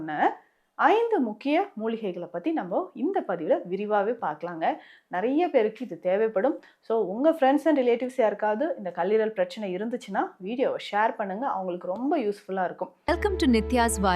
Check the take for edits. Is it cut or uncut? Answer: cut